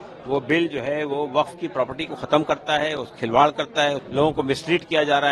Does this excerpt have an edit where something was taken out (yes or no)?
yes